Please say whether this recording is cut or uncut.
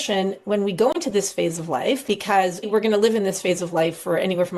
cut